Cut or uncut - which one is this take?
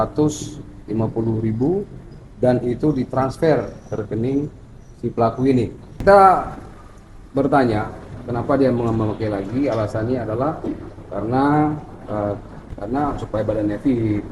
cut